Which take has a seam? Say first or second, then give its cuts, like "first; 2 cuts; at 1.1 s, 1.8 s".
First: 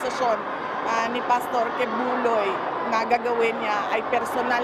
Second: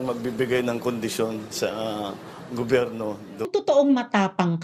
second; 1 cut; at 3.4 s